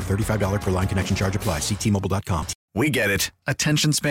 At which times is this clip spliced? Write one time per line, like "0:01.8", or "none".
0:02.6